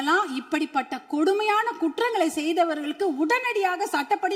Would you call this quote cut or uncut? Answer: uncut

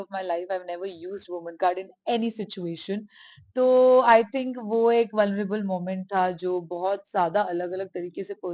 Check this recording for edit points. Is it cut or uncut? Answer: uncut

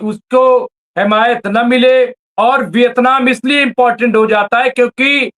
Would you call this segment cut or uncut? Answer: cut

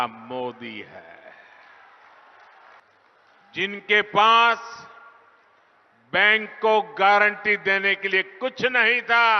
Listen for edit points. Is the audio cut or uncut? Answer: cut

